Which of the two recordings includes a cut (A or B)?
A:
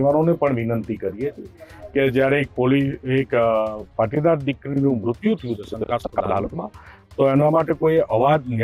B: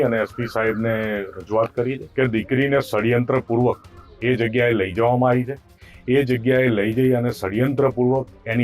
B